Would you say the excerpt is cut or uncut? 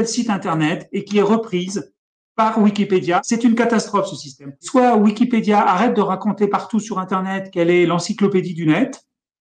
cut